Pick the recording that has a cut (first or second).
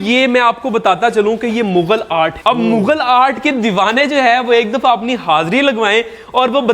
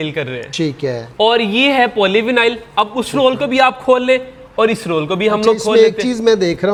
first